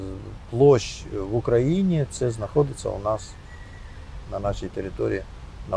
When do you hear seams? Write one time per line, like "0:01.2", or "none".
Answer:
none